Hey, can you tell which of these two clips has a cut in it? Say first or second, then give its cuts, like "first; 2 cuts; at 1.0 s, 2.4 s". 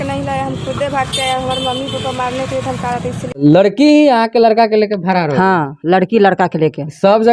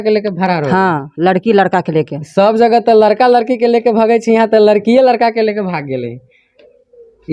first; 1 cut; at 3.4 s